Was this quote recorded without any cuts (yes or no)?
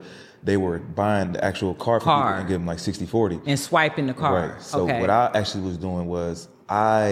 yes